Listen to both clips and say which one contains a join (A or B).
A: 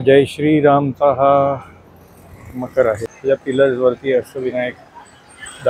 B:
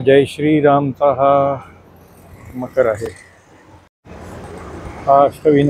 A